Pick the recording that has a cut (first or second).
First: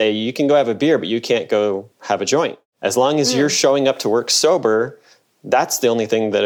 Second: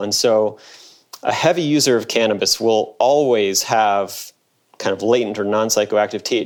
first